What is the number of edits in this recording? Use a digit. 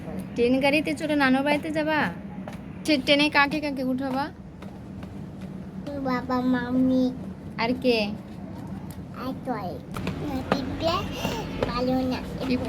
2